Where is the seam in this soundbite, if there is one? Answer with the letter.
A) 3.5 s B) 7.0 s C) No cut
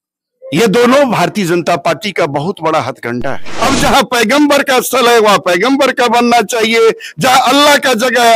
A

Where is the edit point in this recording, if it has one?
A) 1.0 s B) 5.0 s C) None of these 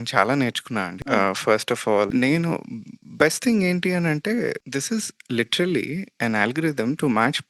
C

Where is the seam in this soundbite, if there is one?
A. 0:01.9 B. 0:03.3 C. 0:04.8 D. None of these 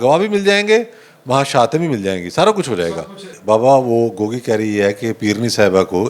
B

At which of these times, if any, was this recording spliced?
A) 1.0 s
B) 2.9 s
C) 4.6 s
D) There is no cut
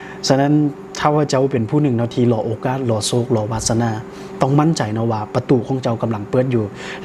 D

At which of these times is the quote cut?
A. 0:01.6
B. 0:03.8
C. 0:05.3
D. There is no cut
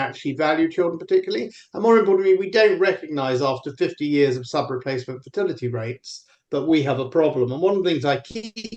D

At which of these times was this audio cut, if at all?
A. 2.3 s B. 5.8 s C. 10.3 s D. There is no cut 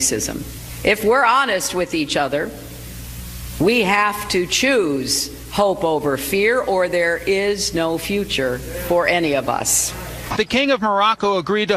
A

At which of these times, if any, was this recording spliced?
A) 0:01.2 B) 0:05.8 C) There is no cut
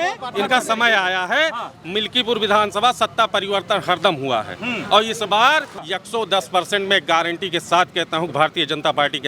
B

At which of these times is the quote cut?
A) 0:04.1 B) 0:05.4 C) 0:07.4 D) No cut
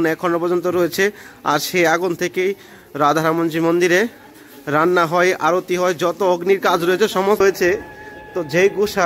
C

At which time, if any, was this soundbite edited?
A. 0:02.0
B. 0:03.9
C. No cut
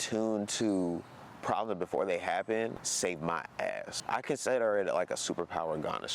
B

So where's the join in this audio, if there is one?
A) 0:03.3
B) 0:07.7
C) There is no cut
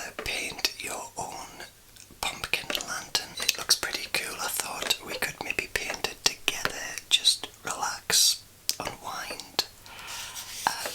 A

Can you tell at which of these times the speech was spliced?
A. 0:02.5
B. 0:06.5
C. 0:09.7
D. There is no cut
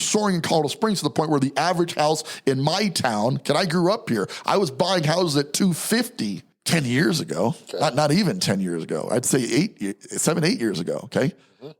B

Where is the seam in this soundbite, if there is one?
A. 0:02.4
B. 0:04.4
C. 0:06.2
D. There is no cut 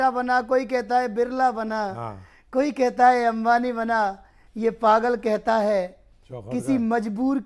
D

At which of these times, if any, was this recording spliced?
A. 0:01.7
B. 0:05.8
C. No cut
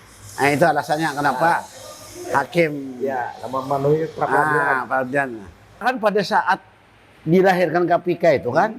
B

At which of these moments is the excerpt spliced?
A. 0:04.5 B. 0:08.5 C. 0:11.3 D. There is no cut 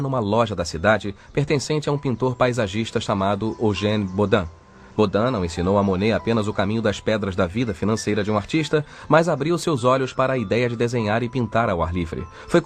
B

